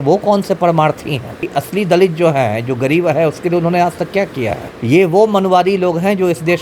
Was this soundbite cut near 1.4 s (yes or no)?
yes